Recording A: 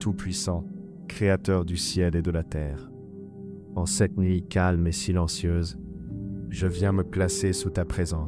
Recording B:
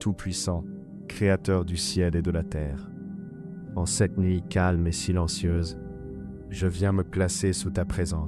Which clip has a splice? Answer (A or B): B